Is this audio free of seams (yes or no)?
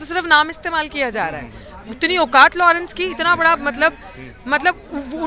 yes